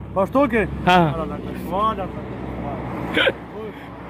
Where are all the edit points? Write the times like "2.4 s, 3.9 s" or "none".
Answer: 1.2 s